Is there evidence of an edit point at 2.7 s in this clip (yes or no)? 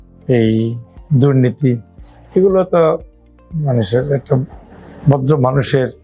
no